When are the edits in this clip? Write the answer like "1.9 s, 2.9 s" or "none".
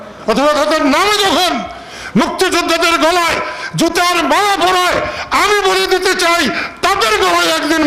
none